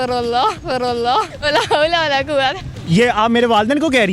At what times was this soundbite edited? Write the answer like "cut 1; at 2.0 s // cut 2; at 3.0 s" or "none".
none